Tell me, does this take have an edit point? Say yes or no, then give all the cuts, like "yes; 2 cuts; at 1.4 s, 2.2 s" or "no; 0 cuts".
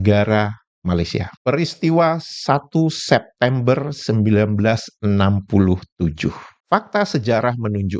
yes; 2 cuts; at 1.3 s, 6.6 s